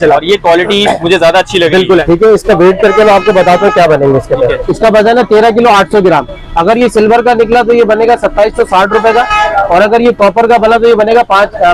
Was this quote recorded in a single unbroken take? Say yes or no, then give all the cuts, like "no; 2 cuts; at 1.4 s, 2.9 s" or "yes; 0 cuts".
no; 2 cuts; at 2.0 s, 4.7 s